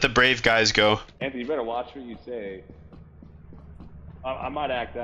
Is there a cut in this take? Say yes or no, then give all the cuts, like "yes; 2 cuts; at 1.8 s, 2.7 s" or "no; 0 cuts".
yes; 1 cut; at 1.1 s